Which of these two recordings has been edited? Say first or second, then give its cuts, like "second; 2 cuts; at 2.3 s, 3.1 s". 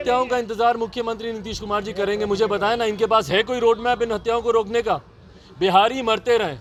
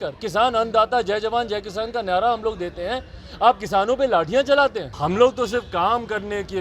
second; 1 cut; at 4.9 s